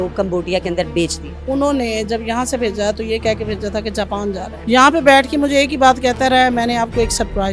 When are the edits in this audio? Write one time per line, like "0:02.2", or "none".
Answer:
0:01.3
0:04.5